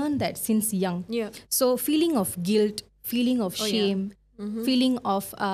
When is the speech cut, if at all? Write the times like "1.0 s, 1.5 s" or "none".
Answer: none